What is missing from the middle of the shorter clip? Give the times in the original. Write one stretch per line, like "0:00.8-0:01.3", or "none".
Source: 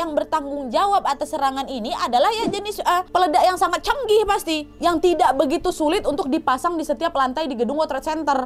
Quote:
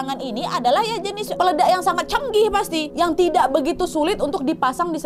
0:02.8-0:03.1
0:04.6-0:04.7